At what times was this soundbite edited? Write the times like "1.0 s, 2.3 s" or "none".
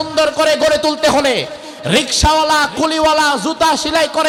none